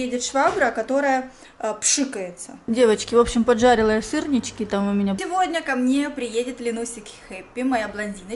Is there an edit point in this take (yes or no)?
yes